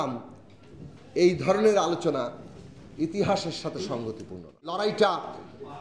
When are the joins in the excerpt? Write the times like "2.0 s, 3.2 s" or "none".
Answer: 4.8 s